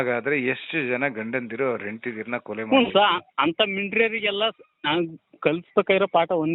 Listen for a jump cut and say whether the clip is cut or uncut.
uncut